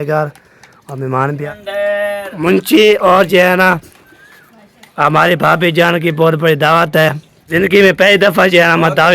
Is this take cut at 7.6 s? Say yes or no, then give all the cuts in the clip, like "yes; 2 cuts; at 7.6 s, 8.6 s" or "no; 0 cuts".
yes; 2 cuts; at 1.4 s, 7.6 s